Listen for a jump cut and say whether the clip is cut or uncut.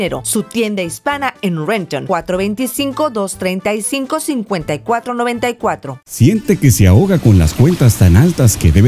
cut